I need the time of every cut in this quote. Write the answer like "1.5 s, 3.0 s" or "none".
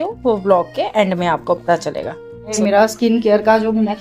2.5 s